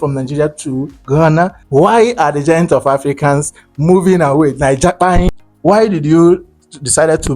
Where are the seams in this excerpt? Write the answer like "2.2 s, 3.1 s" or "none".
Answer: 1.5 s, 5.4 s